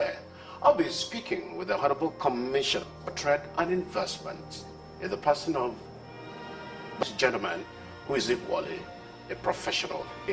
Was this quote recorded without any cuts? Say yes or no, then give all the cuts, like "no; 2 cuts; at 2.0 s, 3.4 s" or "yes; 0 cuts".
no; 1 cut; at 7.0 s